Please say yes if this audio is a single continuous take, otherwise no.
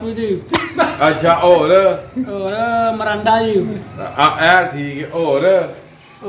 yes